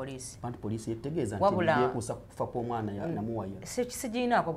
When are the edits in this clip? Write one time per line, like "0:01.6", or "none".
none